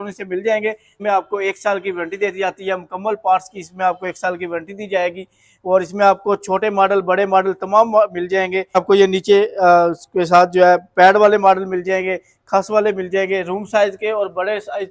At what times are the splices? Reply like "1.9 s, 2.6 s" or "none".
1.0 s, 8.8 s